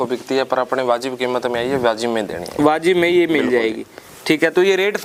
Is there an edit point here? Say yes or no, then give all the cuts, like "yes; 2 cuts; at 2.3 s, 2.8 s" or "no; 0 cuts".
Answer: no; 0 cuts